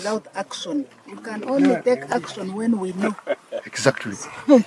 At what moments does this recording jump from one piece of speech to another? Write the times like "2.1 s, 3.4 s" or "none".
none